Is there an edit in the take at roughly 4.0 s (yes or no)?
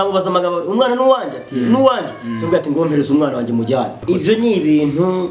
yes